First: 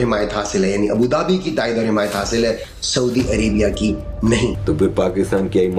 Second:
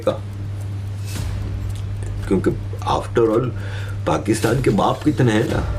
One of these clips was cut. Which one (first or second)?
first